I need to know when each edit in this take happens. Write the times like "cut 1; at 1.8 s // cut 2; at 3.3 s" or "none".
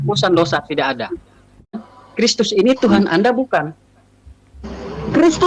cut 1; at 1.8 s